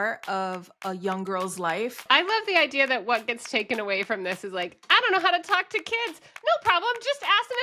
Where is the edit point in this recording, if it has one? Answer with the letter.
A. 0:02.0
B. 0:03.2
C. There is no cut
A